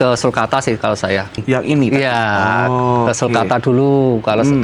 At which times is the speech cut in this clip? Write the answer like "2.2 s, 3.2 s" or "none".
none